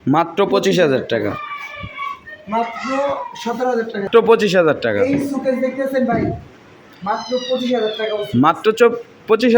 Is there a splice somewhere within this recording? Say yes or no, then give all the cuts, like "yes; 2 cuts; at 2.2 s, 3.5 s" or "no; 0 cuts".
yes; 1 cut; at 4.1 s